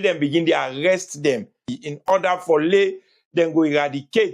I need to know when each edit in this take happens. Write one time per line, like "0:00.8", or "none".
0:01.7